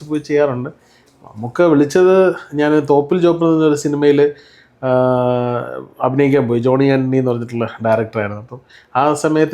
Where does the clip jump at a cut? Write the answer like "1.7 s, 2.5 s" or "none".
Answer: none

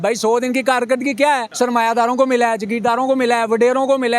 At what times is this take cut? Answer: 1.5 s

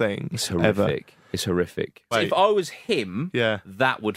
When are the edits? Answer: 2.1 s

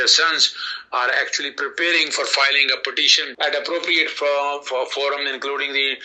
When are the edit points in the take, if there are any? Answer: 3.2 s

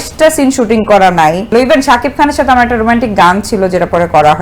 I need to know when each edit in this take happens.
1.4 s

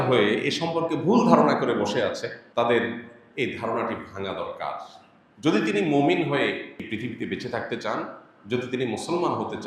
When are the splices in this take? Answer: 2.4 s, 6.8 s

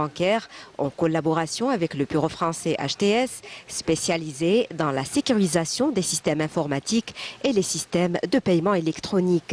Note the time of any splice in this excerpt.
7.1 s

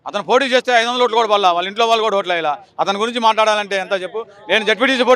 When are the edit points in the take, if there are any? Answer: none

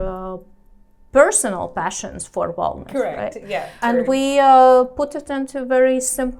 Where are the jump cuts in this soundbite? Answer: 3.8 s

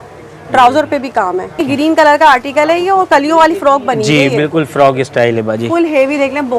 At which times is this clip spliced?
1.6 s

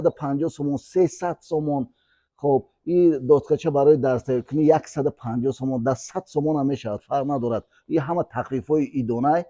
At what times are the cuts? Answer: none

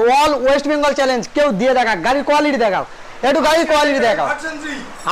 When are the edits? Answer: none

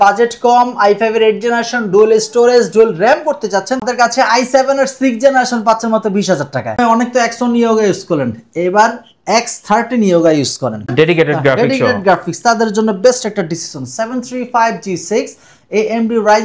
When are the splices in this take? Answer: 3.8 s, 6.8 s, 10.9 s

